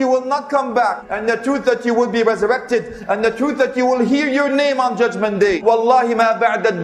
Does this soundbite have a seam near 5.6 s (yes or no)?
yes